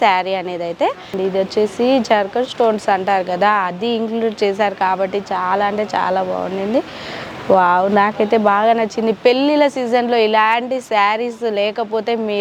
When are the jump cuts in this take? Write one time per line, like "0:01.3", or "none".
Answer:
0:01.1